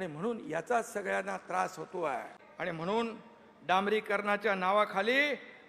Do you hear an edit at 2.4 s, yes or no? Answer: yes